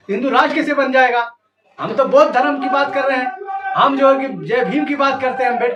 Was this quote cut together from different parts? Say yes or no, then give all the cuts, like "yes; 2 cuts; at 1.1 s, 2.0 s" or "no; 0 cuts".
no; 0 cuts